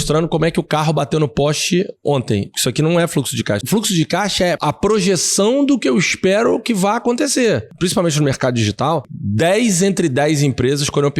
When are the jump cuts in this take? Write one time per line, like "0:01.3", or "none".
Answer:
0:03.6
0:04.6
0:07.7
0:09.2